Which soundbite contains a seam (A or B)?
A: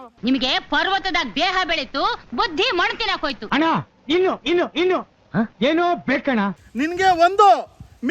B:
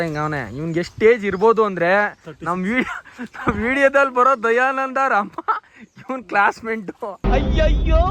A